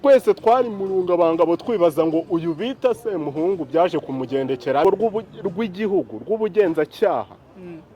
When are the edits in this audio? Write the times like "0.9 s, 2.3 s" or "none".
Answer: 4.8 s